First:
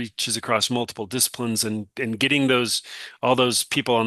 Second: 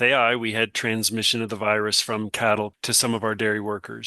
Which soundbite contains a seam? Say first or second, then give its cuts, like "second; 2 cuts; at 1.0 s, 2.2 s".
second; 1 cut; at 2.8 s